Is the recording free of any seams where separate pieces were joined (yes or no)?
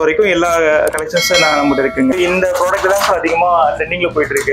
no